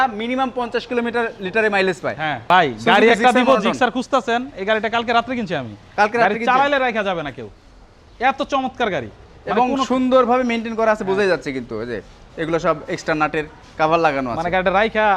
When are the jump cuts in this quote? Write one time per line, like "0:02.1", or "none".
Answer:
none